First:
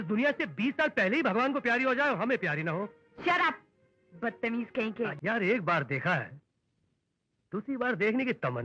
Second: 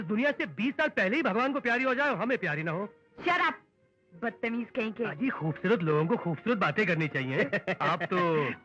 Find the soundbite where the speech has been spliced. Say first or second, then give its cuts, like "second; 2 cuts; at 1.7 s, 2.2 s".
first; 1 cut; at 5.1 s